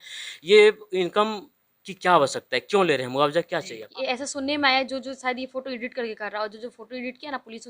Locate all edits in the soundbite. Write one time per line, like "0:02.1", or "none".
0:03.8

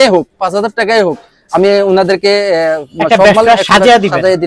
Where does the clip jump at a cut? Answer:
none

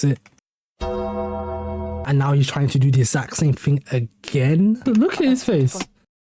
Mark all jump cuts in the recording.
0:04.8

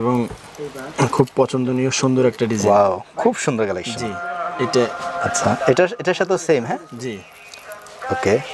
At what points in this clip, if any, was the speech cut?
none

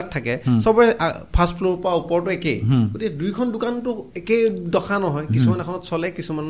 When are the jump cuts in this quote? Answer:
none

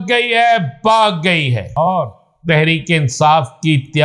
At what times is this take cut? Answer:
0:01.9

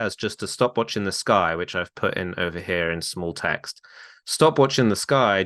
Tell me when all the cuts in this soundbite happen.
none

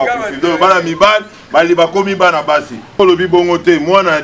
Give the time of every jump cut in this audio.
0:03.0

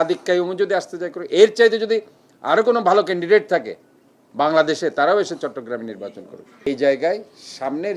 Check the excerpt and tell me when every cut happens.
0:06.7

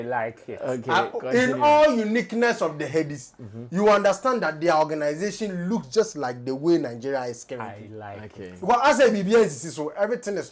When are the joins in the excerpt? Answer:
none

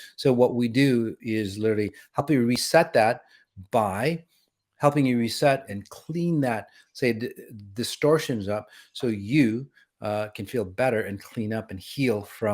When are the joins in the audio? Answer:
0:01.2
0:05.7

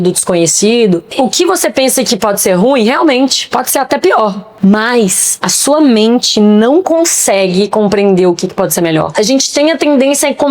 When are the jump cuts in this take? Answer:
0:01.1
0:04.5
0:09.1

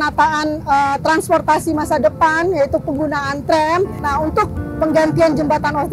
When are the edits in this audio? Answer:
0:04.0

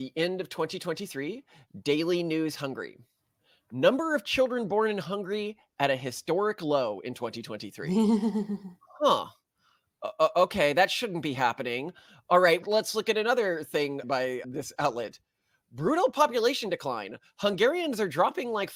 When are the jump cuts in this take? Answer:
none

